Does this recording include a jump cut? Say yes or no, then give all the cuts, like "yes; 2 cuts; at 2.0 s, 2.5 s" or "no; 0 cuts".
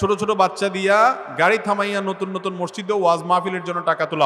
no; 0 cuts